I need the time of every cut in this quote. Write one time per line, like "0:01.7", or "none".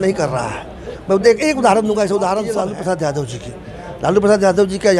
0:02.5